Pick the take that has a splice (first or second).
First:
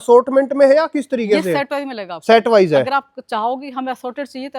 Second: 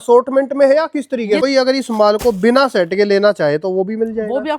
second